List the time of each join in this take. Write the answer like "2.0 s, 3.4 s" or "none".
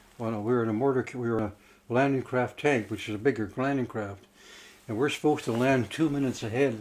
1.4 s